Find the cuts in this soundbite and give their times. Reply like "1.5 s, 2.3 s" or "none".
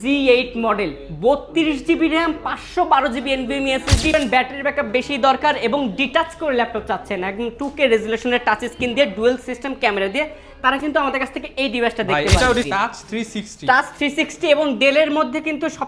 4.1 s, 12.7 s